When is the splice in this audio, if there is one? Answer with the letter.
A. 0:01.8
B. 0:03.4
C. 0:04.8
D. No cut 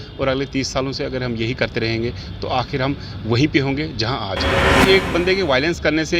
C